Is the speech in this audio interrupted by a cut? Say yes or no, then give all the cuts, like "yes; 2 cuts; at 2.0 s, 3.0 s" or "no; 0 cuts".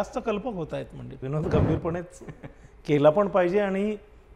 yes; 1 cut; at 1.2 s